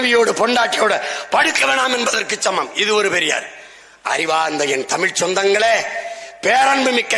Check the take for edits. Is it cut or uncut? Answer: uncut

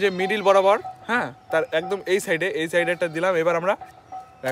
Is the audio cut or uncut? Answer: uncut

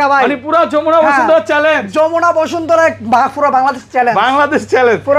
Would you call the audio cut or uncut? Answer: uncut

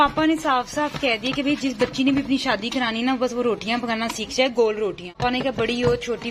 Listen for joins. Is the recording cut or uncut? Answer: cut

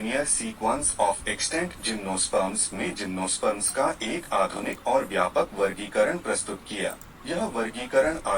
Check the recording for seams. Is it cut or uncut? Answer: cut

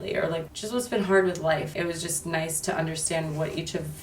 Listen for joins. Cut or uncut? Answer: cut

